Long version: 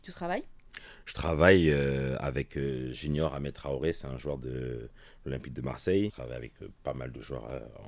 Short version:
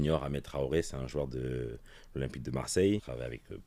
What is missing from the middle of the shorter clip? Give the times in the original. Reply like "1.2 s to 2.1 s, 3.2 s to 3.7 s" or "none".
none